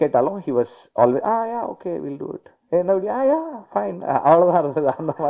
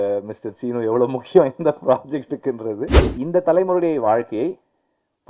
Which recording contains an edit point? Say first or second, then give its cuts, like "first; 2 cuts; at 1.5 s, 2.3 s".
second; 1 cut; at 3.0 s